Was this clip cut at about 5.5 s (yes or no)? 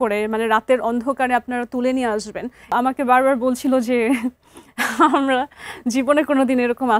no